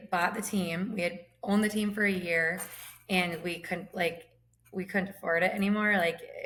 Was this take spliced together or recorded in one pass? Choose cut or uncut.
uncut